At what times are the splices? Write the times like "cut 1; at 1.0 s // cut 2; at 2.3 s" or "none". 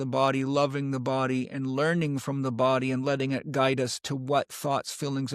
none

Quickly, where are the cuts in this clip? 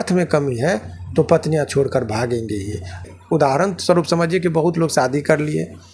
cut 1; at 3.0 s

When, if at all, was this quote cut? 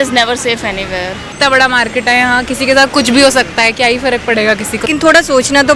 cut 1; at 1.3 s // cut 2; at 4.9 s

